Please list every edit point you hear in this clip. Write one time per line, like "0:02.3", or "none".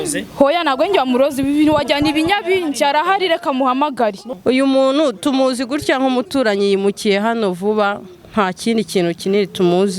0:04.3